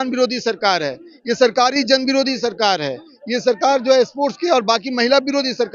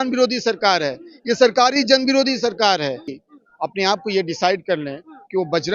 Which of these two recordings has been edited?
second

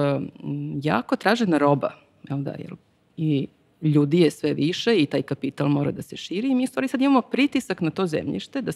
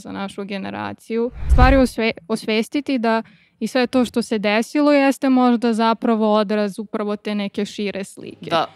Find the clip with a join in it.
second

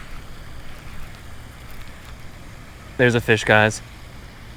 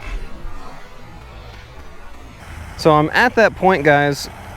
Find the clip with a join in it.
second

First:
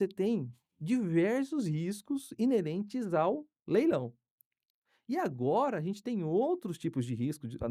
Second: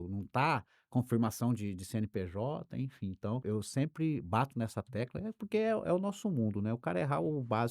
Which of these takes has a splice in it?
second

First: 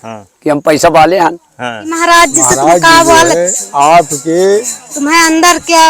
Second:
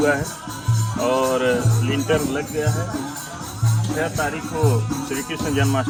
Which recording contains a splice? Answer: first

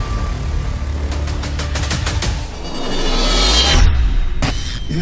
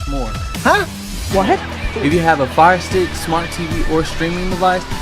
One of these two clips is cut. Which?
first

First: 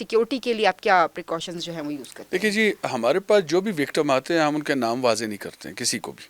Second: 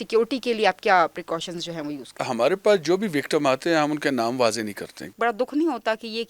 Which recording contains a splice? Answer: second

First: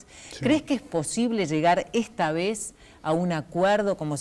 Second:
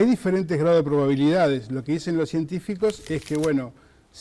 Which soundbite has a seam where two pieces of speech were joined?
second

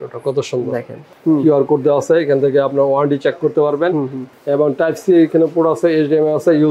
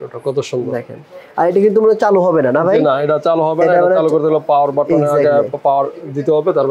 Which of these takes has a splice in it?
first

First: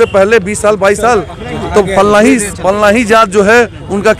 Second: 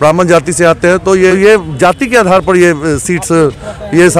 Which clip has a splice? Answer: second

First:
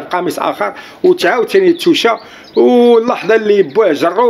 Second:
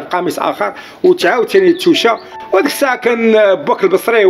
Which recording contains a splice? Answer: second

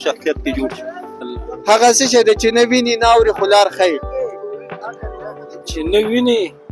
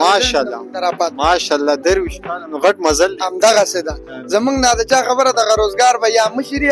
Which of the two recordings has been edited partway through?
first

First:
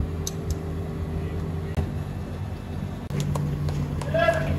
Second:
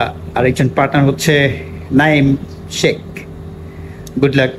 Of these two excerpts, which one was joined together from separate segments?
first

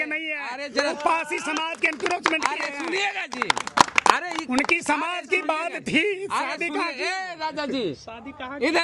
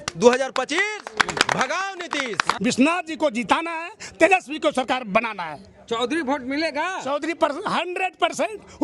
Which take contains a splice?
second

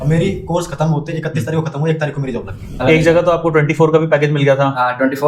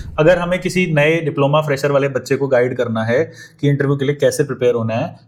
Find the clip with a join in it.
first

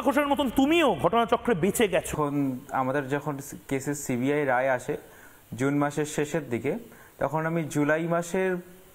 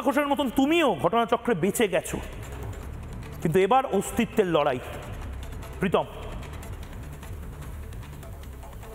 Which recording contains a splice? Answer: first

